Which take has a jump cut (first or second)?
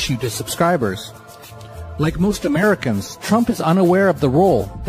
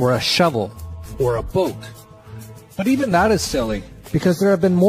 second